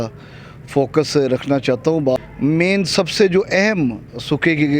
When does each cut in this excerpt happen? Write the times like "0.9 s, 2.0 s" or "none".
2.2 s